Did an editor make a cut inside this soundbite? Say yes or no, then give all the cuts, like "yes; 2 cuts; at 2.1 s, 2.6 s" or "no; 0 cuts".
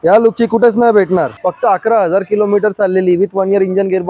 yes; 1 cut; at 1.3 s